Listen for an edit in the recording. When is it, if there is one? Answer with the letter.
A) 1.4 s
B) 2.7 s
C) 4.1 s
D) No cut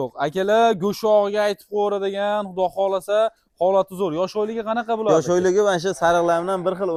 D